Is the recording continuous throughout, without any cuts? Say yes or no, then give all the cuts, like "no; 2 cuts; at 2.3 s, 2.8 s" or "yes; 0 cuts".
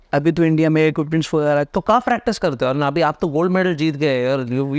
yes; 0 cuts